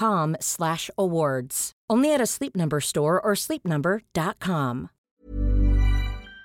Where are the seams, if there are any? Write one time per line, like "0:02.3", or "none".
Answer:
0:05.0